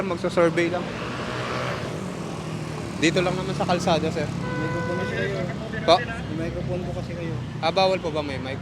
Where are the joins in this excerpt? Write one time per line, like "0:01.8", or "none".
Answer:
none